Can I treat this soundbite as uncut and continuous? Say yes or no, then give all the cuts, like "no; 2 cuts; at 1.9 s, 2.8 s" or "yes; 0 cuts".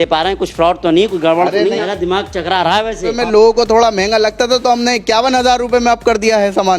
no; 2 cuts; at 1.8 s, 3.2 s